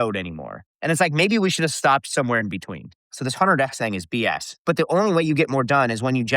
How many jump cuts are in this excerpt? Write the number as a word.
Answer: two